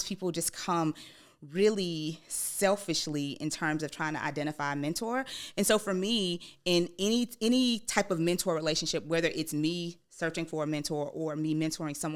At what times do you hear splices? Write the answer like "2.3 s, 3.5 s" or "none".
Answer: none

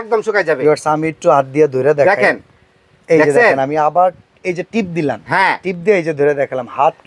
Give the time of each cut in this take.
none

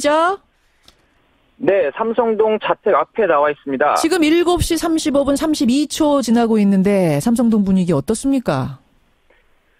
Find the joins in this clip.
none

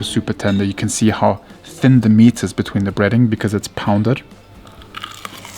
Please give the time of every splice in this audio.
4.3 s

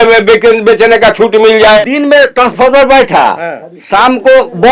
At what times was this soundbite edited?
1.8 s

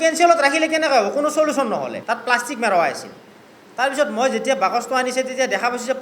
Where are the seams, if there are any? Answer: 2.0 s

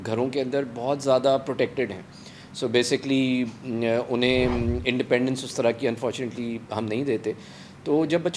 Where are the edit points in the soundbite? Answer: none

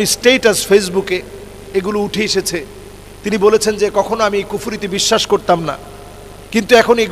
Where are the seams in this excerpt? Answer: none

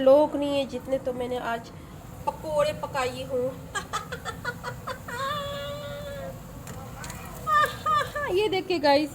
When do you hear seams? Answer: 5.2 s

